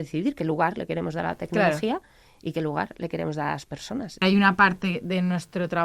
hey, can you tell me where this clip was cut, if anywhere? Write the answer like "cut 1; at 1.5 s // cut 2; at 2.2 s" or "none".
cut 1; at 4.2 s